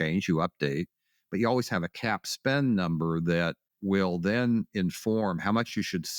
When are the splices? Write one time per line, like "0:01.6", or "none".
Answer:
0:03.7